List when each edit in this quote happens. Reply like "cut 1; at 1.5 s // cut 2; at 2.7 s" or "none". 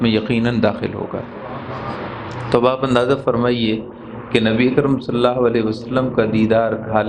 none

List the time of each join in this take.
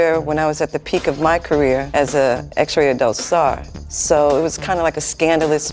none

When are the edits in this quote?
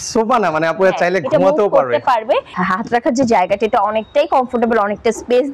cut 1; at 2.5 s

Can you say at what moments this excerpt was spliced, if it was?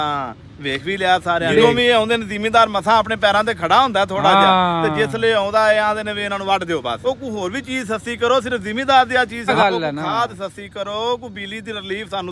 cut 1; at 1.5 s // cut 2; at 7.0 s // cut 3; at 9.5 s

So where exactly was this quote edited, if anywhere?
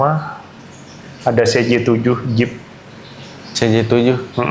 none

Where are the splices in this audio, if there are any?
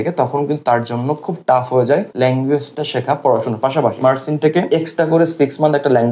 cut 1; at 2.1 s // cut 2; at 4.5 s

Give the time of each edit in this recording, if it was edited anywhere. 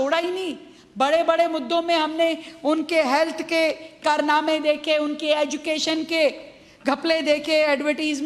none

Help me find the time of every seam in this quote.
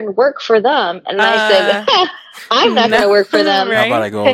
none

